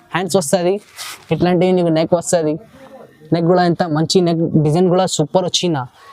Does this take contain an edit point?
no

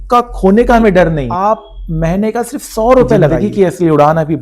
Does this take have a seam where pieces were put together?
yes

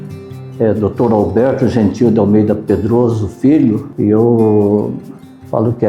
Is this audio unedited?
no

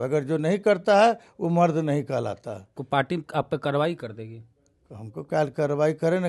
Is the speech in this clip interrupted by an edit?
yes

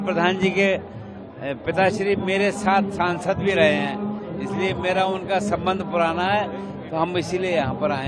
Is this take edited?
no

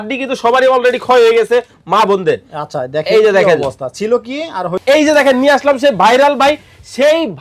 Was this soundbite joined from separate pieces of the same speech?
yes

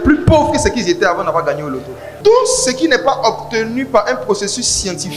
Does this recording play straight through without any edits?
no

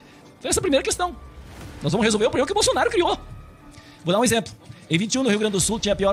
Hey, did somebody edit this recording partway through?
no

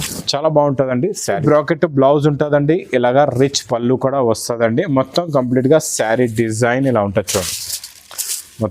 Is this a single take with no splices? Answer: no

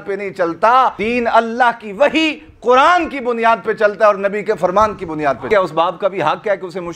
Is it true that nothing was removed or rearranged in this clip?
no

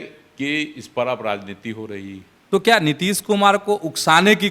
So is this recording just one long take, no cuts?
no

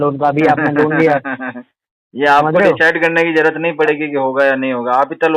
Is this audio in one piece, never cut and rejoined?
yes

